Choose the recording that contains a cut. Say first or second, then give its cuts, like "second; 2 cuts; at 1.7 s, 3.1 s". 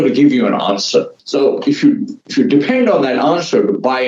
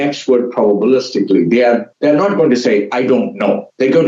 first; 1 cut; at 1.2 s